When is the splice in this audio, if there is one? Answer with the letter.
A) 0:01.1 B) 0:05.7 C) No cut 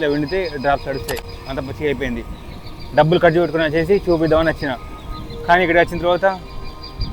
C